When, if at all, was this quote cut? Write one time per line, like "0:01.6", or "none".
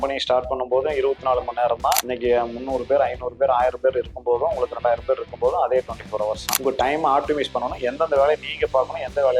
0:02.1
0:06.5